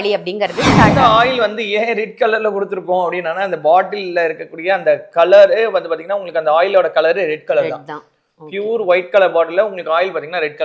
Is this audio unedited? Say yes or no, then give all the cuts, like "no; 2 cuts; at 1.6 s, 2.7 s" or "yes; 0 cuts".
no; 1 cut; at 0.9 s